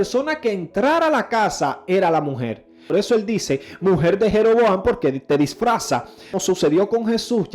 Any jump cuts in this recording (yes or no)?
yes